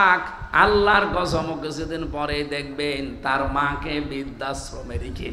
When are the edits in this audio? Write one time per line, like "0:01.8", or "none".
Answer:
none